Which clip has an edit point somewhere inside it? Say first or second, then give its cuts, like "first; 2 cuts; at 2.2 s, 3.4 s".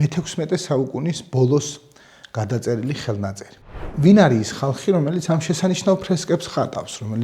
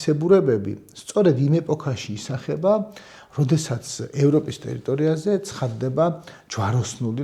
first; 1 cut; at 3.8 s